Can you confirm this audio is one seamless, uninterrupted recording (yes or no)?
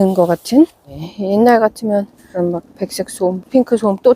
no